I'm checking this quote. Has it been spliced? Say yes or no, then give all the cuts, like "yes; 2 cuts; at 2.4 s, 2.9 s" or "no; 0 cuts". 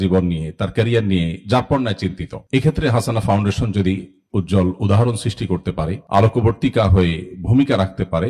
no; 0 cuts